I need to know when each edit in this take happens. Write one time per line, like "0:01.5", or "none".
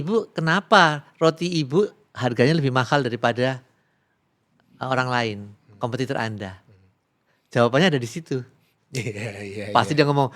none